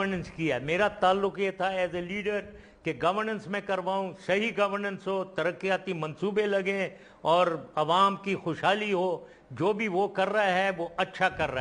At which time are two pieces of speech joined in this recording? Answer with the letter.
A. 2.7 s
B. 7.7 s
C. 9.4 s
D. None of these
C